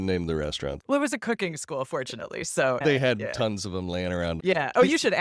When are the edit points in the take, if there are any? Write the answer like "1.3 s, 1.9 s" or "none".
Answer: 2.8 s, 4.4 s